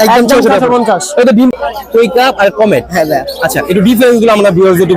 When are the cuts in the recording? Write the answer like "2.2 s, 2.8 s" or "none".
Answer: 1.5 s

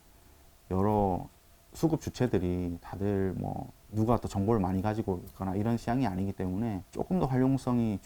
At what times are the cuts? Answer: 6.8 s

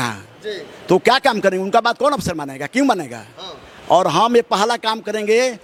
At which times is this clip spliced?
none

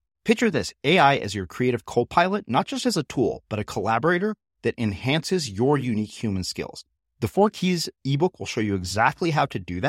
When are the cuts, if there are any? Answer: none

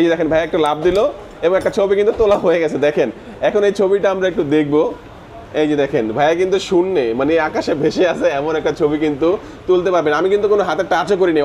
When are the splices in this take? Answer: none

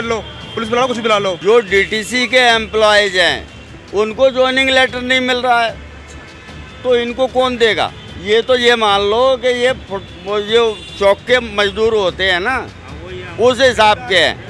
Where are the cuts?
1.4 s

